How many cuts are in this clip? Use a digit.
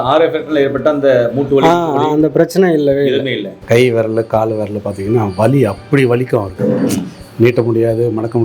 1